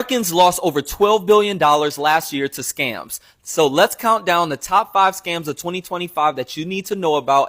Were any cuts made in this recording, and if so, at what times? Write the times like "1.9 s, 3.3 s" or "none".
none